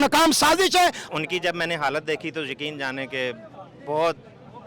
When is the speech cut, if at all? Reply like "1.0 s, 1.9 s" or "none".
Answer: 1.0 s

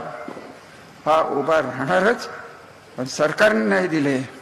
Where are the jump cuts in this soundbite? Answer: none

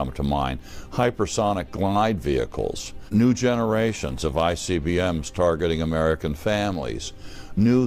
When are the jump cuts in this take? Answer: 3.0 s

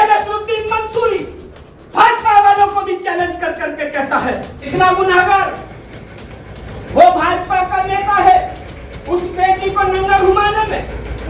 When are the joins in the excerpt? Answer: 4.7 s

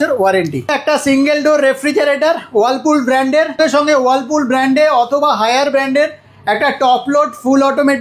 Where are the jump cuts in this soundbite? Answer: 0.7 s, 3.6 s

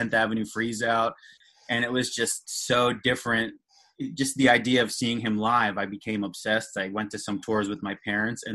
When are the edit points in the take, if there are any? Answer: 1.4 s

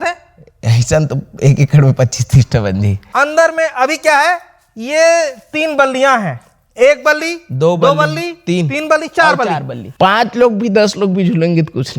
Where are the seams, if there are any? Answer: 3.0 s, 10.0 s

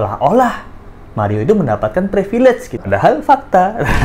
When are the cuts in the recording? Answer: 2.7 s

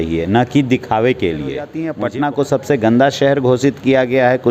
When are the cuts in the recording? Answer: 1.8 s

